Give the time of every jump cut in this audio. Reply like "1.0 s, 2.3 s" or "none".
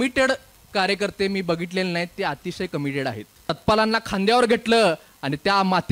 3.6 s